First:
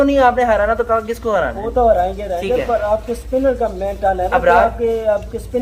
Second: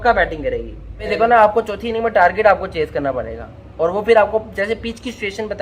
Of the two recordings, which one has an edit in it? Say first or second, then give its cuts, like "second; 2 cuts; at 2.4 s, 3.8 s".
second; 1 cut; at 1.1 s